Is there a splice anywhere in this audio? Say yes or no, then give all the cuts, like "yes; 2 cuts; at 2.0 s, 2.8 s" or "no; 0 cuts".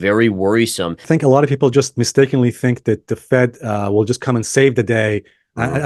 yes; 1 cut; at 1.0 s